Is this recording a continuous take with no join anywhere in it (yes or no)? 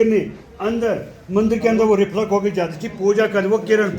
yes